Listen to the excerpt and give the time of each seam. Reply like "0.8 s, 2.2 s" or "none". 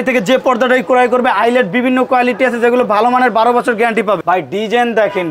4.2 s